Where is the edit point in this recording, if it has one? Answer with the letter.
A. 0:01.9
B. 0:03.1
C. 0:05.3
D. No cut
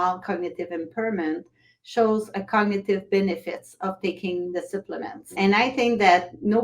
C